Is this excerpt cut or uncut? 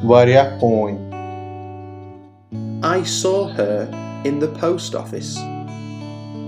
cut